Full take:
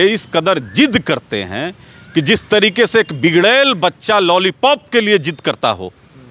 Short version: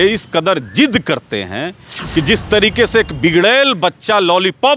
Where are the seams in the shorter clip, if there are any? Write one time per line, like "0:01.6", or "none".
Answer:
none